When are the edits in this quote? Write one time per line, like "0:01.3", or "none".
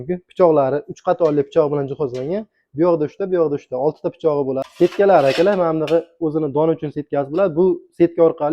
0:04.6